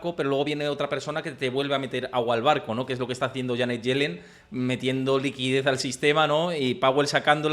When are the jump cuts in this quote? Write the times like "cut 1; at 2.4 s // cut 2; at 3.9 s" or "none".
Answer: none